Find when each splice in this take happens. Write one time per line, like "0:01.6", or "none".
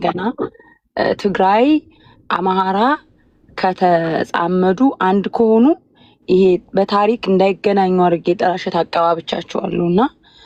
none